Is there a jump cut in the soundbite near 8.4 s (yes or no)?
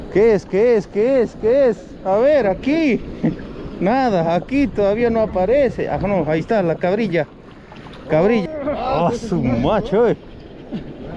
yes